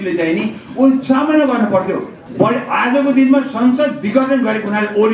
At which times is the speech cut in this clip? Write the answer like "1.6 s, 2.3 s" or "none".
2.1 s